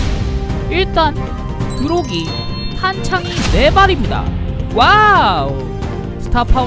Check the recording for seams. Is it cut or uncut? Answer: uncut